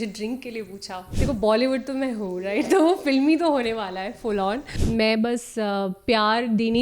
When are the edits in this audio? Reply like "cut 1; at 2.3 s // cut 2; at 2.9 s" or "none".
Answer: cut 1; at 1.1 s // cut 2; at 4.7 s